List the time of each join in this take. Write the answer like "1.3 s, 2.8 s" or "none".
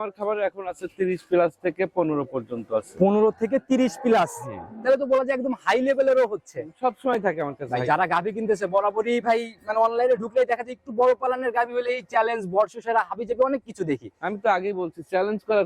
none